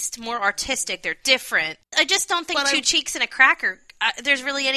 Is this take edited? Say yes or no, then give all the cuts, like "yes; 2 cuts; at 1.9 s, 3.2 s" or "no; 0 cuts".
yes; 1 cut; at 1.9 s